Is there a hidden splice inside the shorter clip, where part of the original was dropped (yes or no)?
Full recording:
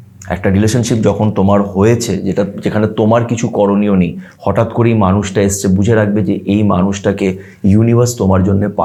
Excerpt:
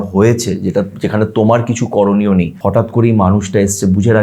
yes